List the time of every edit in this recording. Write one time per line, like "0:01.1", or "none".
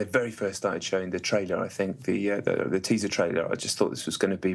0:02.6